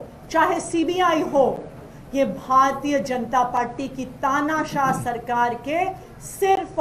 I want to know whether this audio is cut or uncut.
uncut